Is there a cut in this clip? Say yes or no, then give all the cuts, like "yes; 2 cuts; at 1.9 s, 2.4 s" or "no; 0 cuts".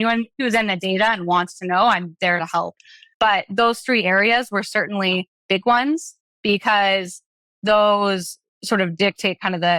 no; 0 cuts